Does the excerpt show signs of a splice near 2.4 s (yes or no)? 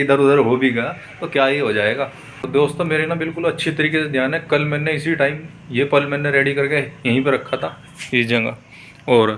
yes